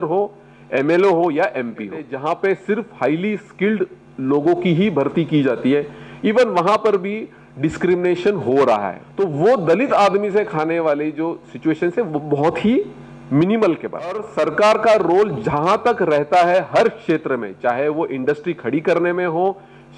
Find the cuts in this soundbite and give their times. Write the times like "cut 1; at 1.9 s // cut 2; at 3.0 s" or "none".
cut 1; at 2.1 s // cut 2; at 9.0 s // cut 3; at 14.3 s

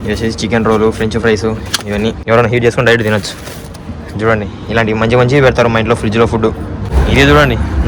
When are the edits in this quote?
cut 1; at 2.2 s // cut 2; at 7.0 s

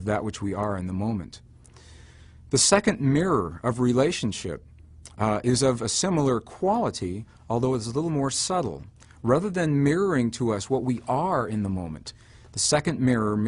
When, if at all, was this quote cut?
cut 1; at 8.5 s

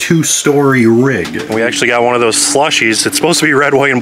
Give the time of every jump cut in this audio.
cut 1; at 1.3 s

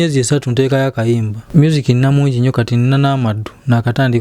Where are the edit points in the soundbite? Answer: cut 1; at 1.4 s

